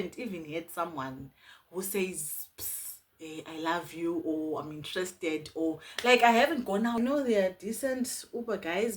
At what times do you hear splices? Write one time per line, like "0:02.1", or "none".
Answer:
0:07.0